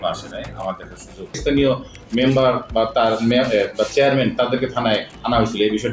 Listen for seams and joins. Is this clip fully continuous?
yes; 0 cuts

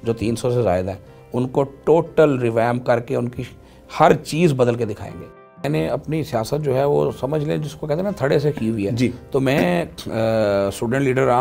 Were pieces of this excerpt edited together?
yes; 1 cut; at 5.6 s

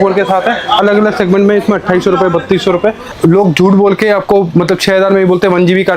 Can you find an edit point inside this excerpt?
yes; 1 cut; at 3.1 s

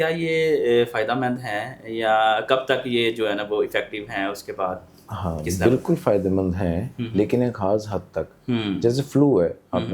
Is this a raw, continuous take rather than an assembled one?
yes; 0 cuts

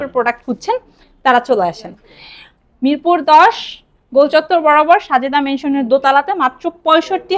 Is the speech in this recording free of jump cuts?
yes; 0 cuts

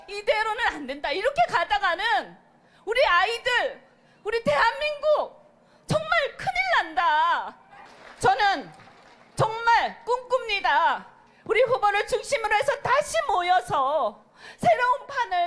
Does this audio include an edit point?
yes; 1 cut; at 11.8 s

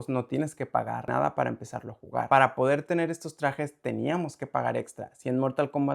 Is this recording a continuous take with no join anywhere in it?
no; 2 cuts; at 1.1 s, 2.3 s

